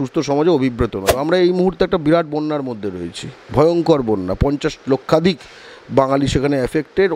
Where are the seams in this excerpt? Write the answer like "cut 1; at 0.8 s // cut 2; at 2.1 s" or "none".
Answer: cut 1; at 1.0 s